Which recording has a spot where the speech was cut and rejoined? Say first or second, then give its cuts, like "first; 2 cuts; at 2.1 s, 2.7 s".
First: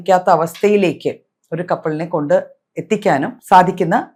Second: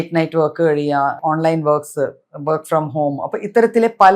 second; 1 cut; at 1.1 s